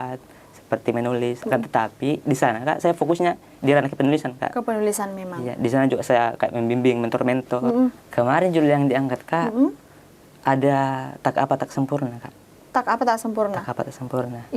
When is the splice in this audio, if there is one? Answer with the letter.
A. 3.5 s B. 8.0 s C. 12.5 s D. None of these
B